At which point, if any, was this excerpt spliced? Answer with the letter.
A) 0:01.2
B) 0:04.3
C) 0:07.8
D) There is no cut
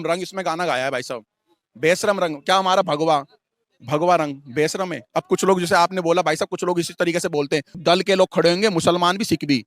C